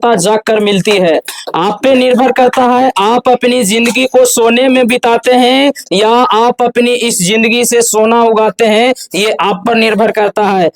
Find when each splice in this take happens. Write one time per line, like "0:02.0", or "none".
none